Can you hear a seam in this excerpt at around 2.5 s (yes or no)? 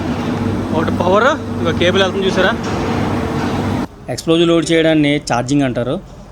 no